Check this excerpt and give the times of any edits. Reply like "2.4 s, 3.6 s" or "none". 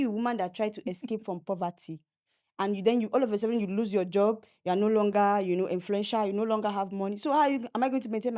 none